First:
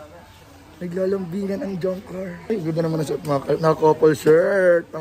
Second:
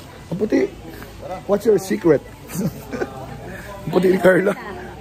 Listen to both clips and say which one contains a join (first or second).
first